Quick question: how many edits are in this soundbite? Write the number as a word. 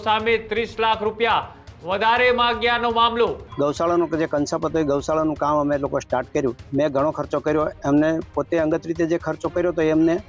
two